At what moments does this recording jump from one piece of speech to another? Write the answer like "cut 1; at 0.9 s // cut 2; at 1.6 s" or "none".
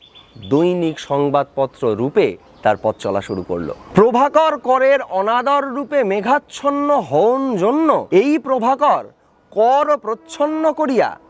cut 1; at 2.5 s // cut 2; at 3.8 s // cut 3; at 8.0 s